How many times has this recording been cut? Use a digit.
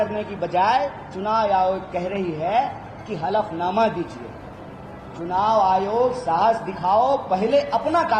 0